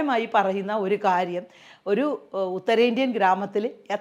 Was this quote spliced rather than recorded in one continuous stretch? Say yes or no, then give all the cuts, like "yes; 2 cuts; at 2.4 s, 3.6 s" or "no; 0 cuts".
no; 0 cuts